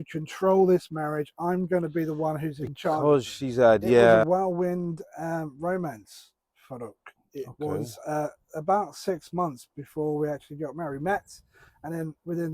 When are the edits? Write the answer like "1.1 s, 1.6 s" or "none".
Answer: 4.2 s